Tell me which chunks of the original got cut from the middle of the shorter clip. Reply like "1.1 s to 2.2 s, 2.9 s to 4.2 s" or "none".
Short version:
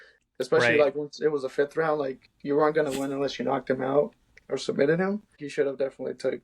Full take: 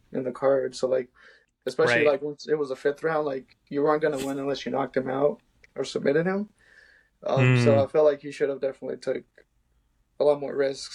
6.7 s to 8.3 s